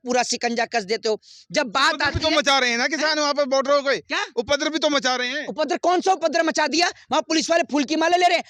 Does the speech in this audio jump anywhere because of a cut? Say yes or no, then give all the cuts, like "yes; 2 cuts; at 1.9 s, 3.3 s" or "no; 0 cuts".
no; 0 cuts